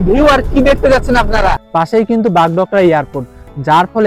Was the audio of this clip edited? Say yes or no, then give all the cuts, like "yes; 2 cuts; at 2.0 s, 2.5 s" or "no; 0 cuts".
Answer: yes; 1 cut; at 1.6 s